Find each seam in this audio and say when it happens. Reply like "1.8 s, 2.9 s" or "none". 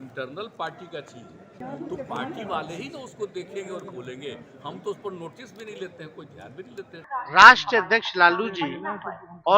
1.5 s, 7.0 s

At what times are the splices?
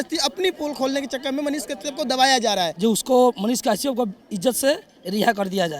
2.7 s

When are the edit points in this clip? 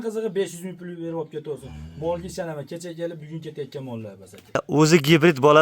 4.6 s

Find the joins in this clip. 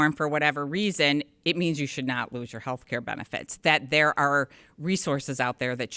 none

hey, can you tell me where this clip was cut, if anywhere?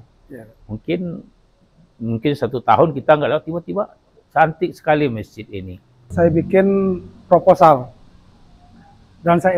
6.1 s

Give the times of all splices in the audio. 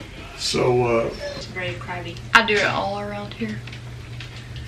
1.5 s

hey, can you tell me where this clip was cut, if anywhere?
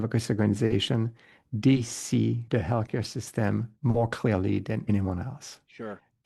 2.4 s, 4.8 s

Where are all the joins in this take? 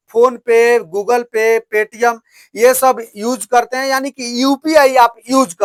none

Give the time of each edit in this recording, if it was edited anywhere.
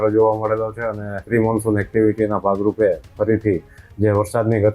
1.2 s

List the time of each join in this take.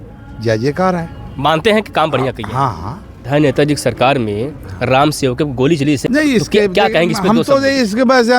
3.2 s, 6.0 s

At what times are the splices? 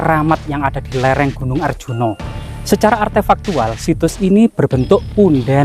2.3 s

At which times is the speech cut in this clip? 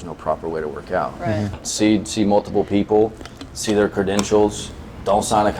1.6 s

